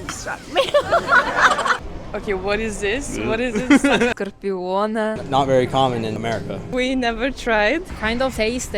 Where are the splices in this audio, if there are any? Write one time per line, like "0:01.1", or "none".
0:01.9
0:04.1
0:06.2